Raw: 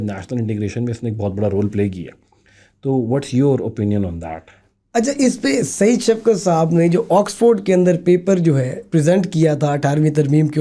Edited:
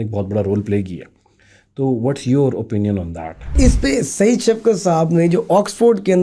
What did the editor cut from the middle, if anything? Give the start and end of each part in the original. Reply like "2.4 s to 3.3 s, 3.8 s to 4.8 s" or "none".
4.6 s to 5.1 s